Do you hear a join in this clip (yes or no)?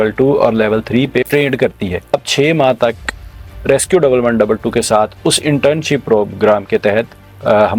yes